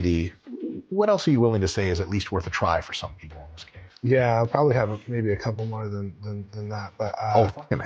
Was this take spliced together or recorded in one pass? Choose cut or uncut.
uncut